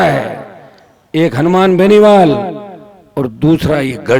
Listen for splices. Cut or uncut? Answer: uncut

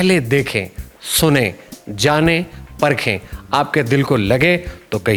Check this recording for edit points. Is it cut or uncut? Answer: uncut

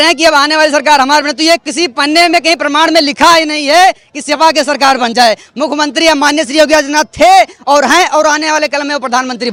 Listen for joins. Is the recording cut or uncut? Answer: uncut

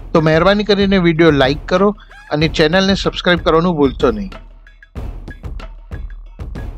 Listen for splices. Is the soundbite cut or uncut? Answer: cut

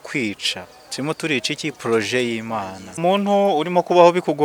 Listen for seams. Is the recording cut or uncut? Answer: cut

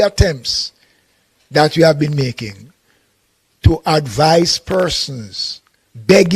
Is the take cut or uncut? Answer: uncut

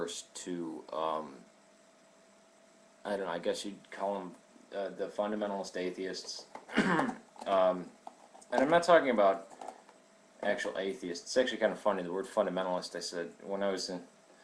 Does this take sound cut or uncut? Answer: uncut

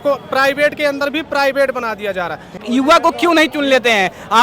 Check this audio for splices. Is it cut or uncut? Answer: cut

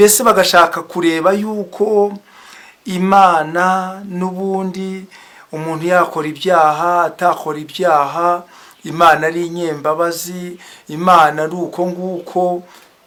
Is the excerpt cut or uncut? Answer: uncut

